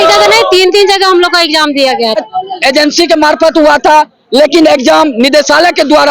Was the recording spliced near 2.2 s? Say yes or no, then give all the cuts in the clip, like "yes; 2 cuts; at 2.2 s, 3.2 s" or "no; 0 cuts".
yes; 1 cut; at 2.2 s